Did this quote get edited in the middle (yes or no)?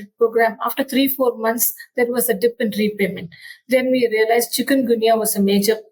no